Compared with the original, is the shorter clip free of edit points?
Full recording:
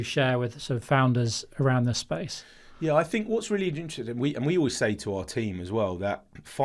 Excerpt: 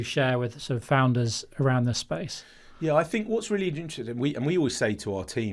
yes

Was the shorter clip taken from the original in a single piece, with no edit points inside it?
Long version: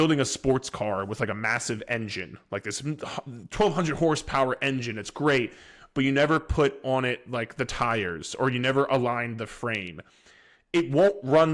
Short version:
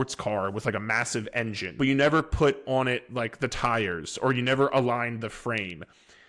no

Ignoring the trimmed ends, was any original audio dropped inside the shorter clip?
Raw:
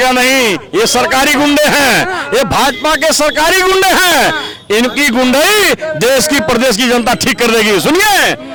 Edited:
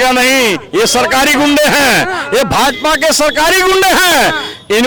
no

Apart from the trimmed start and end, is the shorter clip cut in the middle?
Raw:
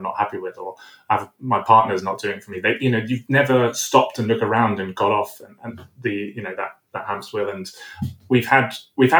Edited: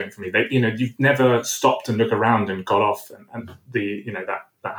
no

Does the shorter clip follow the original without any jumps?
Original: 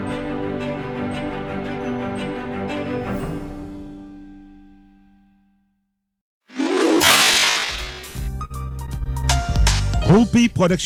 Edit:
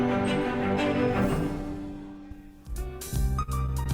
no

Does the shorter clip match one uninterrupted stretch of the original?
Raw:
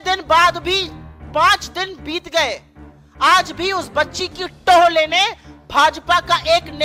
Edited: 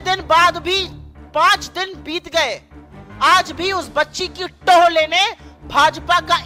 yes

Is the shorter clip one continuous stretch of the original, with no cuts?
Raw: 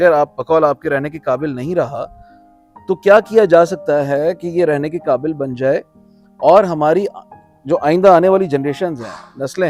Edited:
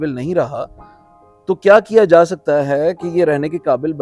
yes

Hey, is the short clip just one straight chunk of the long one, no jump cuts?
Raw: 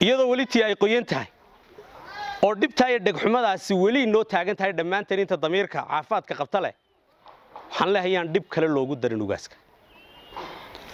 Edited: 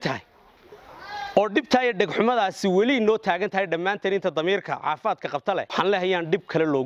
no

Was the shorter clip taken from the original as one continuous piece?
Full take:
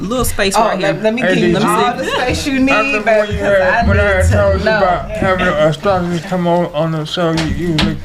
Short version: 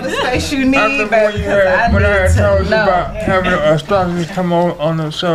yes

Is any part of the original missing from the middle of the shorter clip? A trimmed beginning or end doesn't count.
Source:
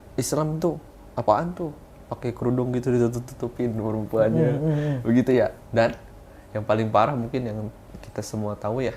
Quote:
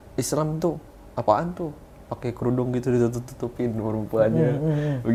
no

